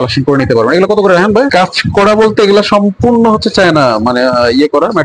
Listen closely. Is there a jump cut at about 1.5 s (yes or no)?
yes